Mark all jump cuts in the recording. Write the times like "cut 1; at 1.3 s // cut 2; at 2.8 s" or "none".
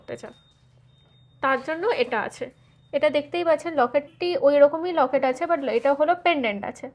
none